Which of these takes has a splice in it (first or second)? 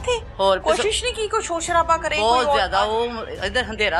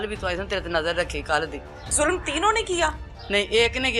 second